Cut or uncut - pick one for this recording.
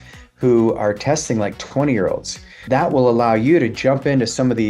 cut